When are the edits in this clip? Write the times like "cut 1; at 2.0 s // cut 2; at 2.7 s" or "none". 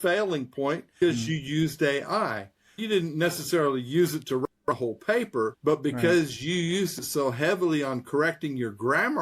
cut 1; at 1.0 s // cut 2; at 5.6 s